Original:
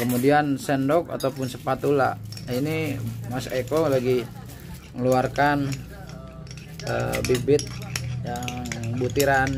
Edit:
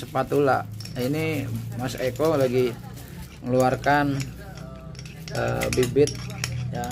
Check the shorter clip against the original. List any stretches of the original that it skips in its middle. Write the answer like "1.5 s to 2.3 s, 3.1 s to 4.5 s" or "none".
none